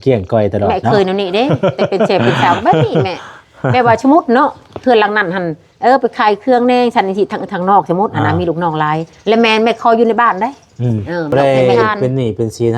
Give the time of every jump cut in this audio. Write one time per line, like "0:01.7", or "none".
0:11.3